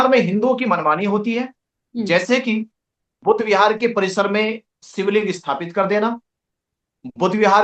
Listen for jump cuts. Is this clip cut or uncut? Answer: uncut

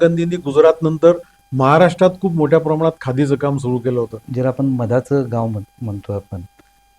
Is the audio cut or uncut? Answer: cut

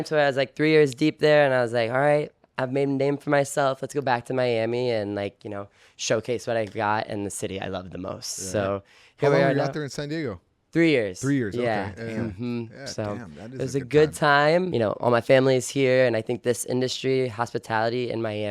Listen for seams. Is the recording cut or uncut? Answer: cut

